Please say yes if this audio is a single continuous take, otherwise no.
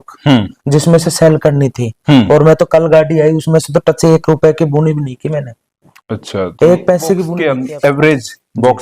no